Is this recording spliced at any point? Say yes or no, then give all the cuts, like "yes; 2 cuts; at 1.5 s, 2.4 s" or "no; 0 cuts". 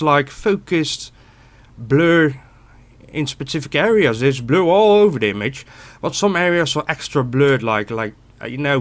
no; 0 cuts